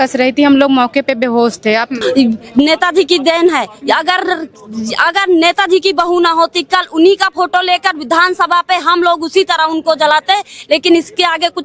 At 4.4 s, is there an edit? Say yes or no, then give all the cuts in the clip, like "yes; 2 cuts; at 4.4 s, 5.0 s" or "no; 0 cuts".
no; 1 cut; at 2.0 s